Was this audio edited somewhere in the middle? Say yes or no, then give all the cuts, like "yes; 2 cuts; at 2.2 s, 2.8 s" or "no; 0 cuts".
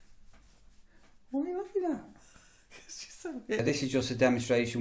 yes; 1 cut; at 3.7 s